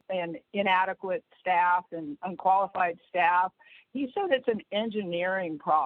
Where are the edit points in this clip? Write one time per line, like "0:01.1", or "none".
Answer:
none

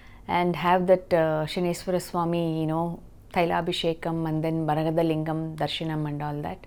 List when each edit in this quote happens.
none

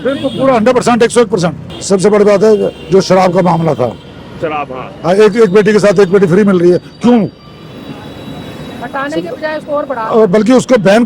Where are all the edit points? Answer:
0:01.7

